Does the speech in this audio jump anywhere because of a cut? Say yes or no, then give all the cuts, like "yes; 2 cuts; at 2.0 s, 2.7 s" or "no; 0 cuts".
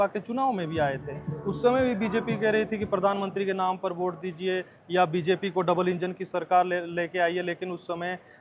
no; 0 cuts